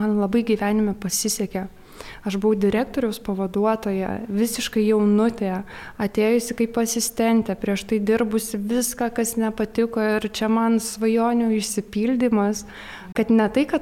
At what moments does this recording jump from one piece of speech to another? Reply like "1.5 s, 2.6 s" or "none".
none